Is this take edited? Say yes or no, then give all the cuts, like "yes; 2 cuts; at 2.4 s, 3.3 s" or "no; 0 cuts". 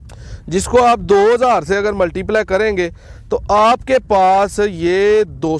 no; 0 cuts